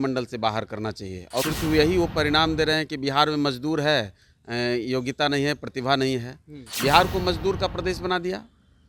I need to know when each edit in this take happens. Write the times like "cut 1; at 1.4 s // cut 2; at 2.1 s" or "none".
cut 1; at 1.4 s // cut 2; at 6.6 s